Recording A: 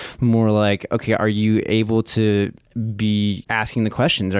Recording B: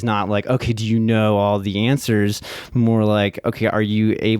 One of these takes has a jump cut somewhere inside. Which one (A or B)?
A